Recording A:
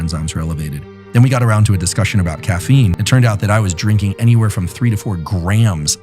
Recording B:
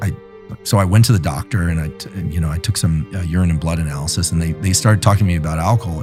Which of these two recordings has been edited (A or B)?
A